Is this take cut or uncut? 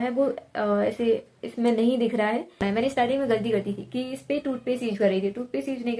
cut